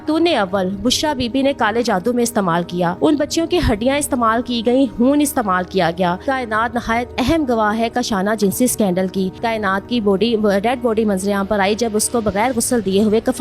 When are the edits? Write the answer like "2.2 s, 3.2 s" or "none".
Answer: 6.2 s, 9.4 s